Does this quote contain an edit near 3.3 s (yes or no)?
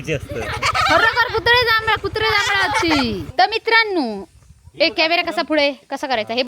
yes